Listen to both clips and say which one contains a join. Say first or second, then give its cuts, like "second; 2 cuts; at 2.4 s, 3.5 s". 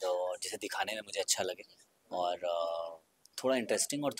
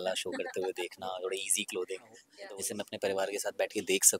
second; 1 cut; at 2.3 s